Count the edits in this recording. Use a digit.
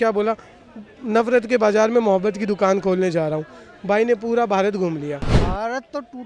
1